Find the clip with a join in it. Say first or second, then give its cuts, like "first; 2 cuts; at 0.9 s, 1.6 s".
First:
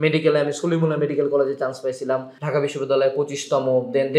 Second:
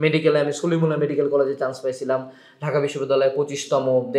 first; 1 cut; at 2.3 s